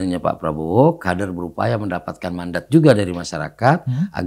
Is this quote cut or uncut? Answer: uncut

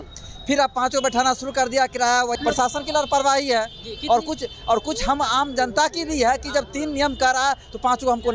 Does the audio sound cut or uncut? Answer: cut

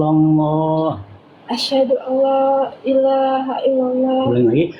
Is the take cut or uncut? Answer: uncut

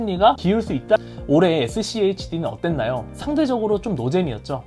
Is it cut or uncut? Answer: cut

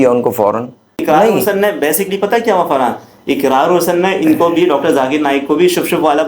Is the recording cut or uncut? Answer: cut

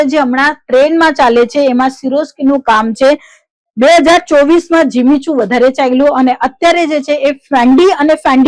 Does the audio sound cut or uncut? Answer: uncut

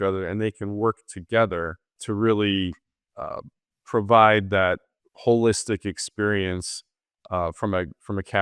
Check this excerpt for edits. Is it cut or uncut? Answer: cut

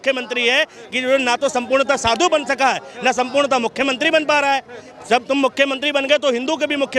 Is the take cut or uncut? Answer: uncut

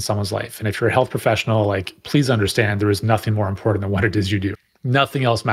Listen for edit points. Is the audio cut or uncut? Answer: cut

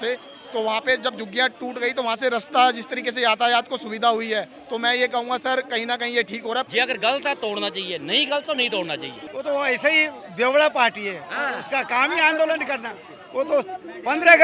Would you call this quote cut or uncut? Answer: cut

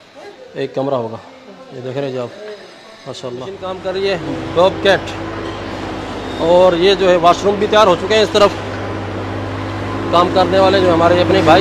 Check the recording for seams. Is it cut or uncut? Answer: cut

